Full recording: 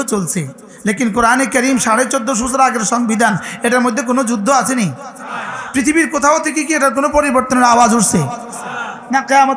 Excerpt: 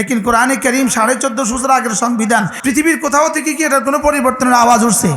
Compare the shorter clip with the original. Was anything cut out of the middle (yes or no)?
yes